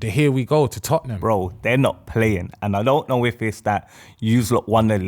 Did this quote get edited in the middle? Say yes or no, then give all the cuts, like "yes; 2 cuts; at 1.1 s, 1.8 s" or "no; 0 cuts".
yes; 1 cut; at 1.1 s